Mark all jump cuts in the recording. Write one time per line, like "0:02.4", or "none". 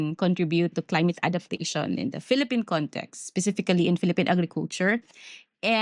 none